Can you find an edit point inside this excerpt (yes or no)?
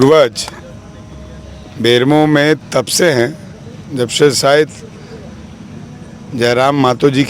no